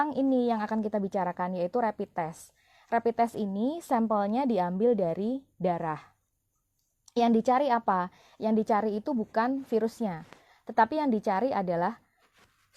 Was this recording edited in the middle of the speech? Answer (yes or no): no